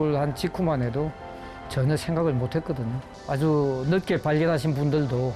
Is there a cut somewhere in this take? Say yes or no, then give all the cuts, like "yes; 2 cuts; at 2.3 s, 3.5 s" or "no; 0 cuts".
yes; 1 cut; at 3.2 s